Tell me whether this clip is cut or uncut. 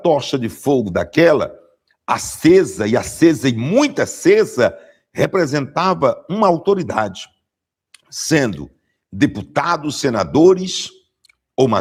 uncut